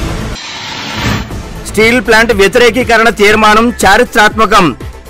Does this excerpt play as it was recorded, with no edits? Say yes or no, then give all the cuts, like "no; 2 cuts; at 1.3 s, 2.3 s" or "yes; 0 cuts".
no; 1 cut; at 1.1 s